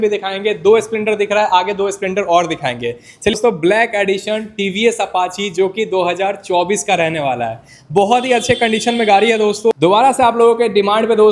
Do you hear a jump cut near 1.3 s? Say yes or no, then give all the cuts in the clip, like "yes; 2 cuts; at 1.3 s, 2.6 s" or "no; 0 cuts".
no; 2 cuts; at 3.3 s, 9.7 s